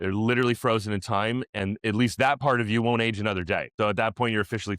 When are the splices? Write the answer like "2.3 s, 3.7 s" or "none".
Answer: 3.7 s